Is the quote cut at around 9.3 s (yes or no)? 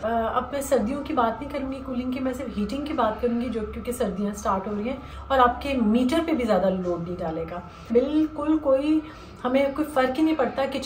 no